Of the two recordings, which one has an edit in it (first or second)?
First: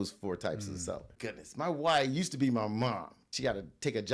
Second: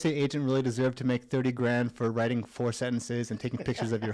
first